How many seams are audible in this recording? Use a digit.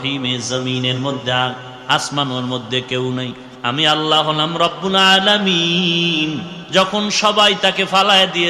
2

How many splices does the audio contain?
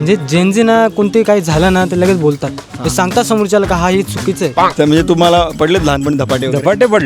1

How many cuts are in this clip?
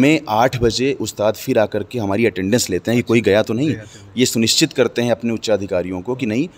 0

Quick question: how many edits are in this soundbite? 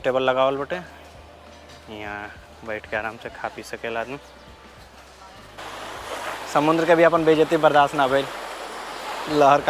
1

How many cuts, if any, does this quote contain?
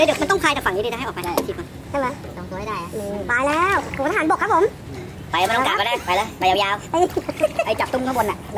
0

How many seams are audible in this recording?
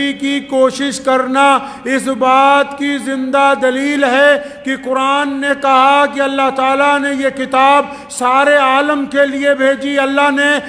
0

